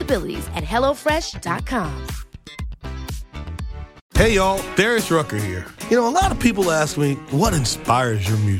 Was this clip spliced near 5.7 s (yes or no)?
no